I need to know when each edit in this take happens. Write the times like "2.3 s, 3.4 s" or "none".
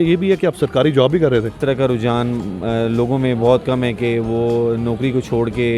1.5 s